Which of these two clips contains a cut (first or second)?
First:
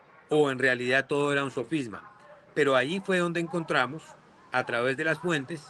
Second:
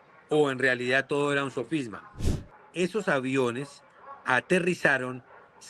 second